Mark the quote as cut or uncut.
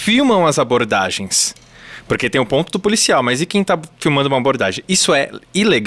uncut